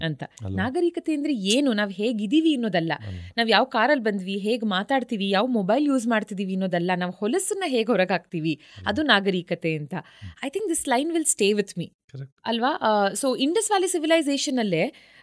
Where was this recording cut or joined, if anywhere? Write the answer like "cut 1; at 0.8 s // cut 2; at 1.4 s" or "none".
none